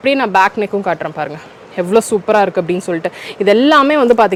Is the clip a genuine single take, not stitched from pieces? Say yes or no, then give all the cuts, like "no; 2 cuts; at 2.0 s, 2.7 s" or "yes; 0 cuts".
yes; 0 cuts